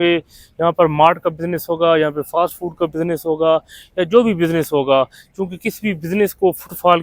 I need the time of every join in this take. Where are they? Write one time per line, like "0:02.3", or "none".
none